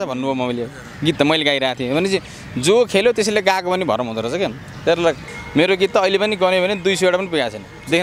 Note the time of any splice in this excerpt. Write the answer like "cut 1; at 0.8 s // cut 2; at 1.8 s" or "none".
cut 1; at 5.3 s